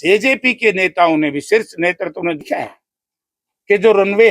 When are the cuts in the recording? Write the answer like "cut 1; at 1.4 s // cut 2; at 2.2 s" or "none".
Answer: cut 1; at 2.5 s